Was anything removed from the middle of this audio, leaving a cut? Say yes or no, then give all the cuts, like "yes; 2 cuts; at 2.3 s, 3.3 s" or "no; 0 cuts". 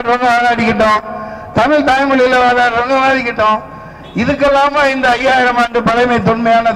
no; 0 cuts